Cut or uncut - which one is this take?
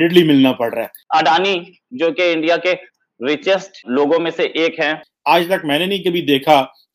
cut